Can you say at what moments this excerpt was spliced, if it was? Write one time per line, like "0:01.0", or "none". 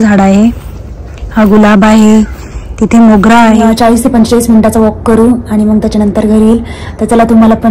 0:03.6